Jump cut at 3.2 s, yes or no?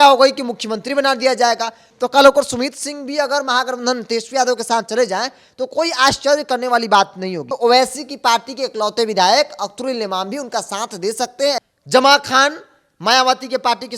no